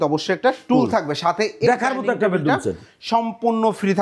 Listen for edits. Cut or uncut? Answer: uncut